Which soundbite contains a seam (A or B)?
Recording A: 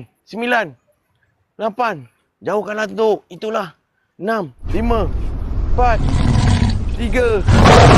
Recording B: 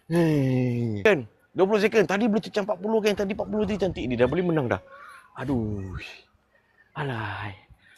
B